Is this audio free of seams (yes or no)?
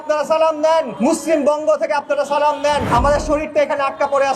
no